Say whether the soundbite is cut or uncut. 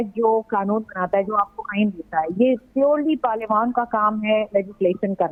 uncut